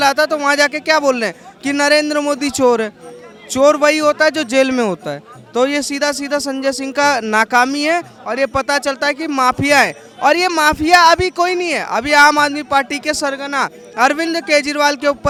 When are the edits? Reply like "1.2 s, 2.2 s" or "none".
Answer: none